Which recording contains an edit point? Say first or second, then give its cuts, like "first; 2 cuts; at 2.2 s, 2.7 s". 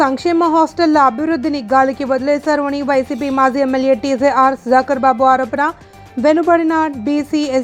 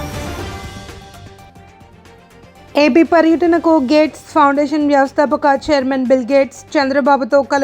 second; 1 cut; at 1.3 s